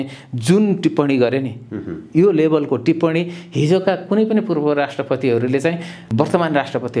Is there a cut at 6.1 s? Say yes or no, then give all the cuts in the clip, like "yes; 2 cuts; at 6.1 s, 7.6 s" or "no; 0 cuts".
yes; 1 cut; at 6.1 s